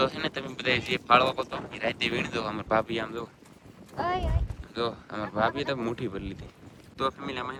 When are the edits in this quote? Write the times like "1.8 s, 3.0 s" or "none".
none

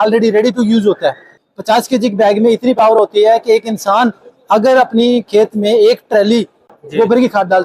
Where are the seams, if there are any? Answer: 1.3 s

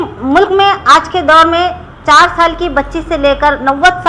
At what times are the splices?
none

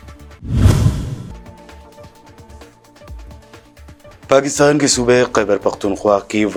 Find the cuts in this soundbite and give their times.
none

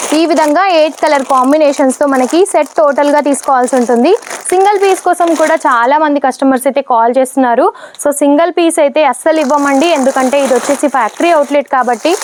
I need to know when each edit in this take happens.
none

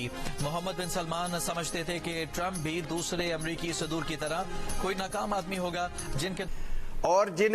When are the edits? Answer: 6.5 s

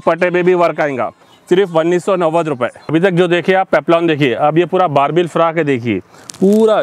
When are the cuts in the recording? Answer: none

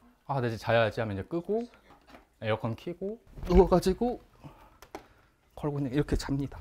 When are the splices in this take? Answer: none

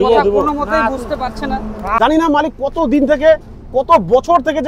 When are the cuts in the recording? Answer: 2.0 s

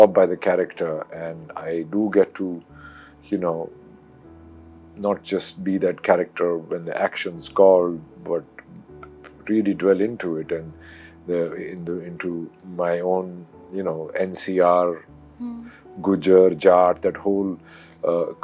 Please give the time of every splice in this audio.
none

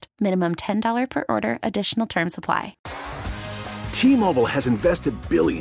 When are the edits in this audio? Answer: 2.8 s

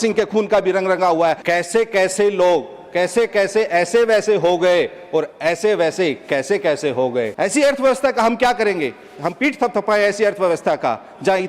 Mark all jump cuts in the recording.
1.4 s, 7.3 s

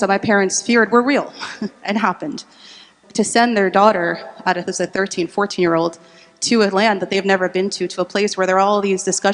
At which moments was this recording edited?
2.9 s

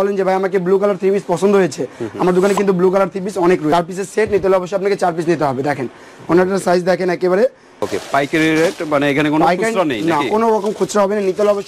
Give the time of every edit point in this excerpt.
3.7 s, 7.9 s

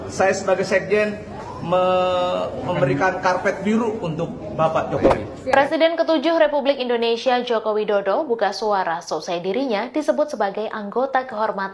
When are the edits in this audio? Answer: 5.3 s

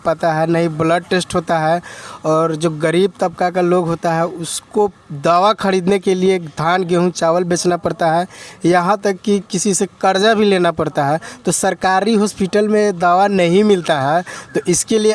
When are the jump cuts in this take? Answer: none

